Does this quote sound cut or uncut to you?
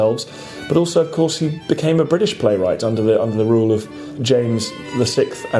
cut